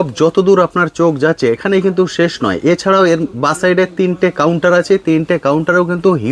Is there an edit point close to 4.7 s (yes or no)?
no